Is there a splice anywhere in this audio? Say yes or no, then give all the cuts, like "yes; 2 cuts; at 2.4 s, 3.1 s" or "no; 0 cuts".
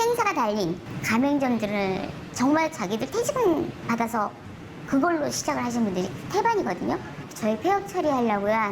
yes; 4 cuts; at 0.9 s, 2.2 s, 3.8 s, 7.3 s